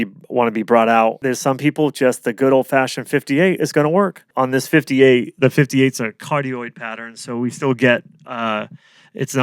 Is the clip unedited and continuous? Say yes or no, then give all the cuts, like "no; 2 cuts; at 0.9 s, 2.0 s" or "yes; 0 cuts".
no; 2 cuts; at 1.2 s, 4.3 s